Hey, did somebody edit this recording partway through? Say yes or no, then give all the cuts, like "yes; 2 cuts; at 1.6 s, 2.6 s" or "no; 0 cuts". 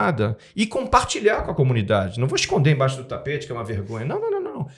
no; 0 cuts